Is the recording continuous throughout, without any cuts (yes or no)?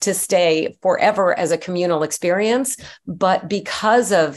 yes